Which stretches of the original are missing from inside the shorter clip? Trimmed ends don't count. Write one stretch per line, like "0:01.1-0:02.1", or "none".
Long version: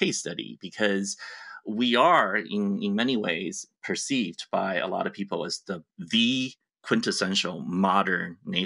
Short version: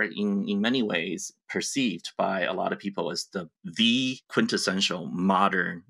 0:06.6-0:06.8